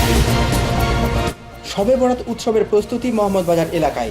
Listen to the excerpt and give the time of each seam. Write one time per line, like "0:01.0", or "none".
0:01.1